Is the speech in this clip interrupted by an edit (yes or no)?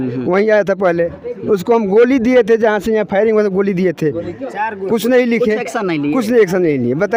no